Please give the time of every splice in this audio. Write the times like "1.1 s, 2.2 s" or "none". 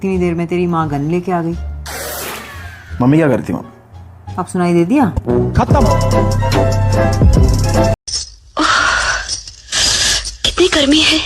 8.1 s